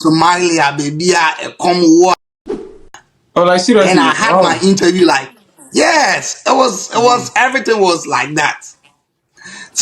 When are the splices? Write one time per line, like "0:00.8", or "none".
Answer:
0:02.6